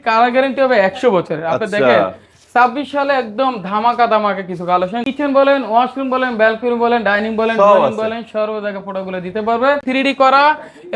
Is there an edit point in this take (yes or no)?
yes